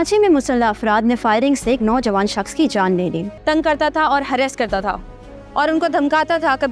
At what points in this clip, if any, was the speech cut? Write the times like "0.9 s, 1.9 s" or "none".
3.3 s

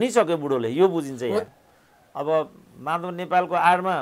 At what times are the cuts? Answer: 1.5 s

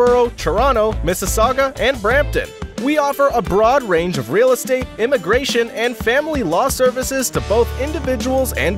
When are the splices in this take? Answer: none

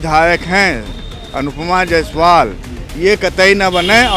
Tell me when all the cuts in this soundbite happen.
none

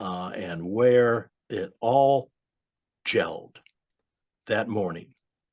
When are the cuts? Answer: none

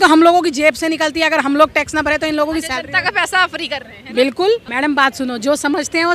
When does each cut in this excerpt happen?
4.7 s

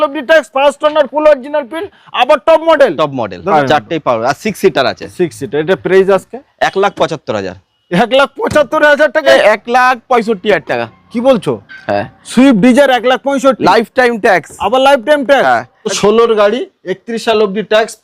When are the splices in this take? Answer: 3.5 s, 9.3 s, 15.9 s

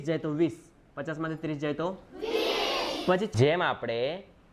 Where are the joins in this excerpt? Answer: 3.3 s

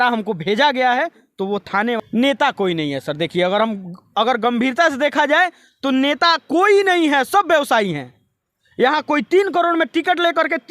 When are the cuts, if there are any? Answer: 2.0 s

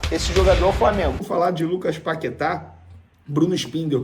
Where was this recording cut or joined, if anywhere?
1.3 s

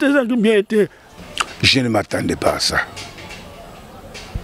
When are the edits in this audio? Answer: 1.0 s

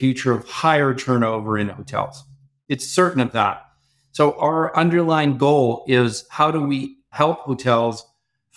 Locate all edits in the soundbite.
7.1 s

